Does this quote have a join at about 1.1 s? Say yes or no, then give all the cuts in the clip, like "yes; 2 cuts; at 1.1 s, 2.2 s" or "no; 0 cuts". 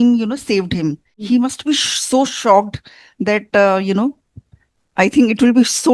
yes; 1 cut; at 1.1 s